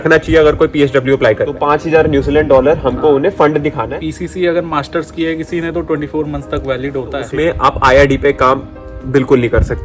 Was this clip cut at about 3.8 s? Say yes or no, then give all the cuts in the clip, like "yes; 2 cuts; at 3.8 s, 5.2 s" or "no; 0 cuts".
yes; 3 cuts; at 1.6 s, 3.8 s, 7.2 s